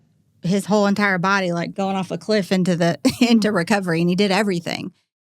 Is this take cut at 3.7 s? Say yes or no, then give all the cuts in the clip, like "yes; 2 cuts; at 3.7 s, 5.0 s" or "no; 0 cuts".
no; 1 cut; at 1.7 s